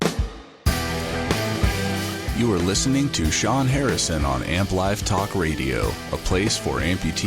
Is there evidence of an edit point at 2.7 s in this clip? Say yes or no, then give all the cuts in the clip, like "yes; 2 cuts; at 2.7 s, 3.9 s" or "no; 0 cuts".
no; 1 cut; at 1.0 s